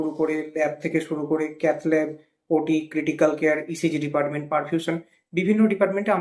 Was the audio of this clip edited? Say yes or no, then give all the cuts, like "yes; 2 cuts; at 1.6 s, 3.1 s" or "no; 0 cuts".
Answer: no; 0 cuts